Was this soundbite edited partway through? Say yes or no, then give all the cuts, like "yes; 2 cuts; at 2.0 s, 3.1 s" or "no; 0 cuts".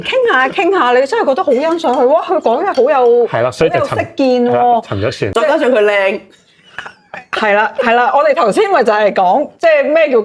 yes; 1 cut; at 5.2 s